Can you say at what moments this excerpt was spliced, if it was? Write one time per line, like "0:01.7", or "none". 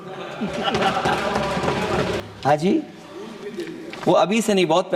0:02.2